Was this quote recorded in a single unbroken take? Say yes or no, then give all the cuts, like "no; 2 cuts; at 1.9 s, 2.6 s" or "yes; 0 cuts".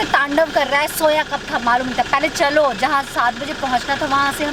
yes; 0 cuts